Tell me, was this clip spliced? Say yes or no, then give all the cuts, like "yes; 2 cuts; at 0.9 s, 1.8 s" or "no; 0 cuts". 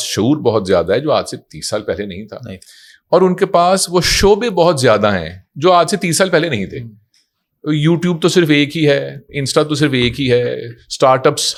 no; 0 cuts